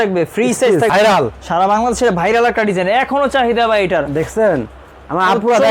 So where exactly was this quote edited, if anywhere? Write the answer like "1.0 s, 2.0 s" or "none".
0.9 s